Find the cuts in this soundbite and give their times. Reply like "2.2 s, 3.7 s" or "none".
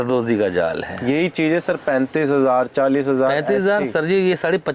none